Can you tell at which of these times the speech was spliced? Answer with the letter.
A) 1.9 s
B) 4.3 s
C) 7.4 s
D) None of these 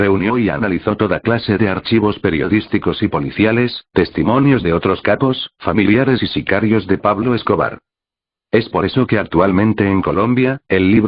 A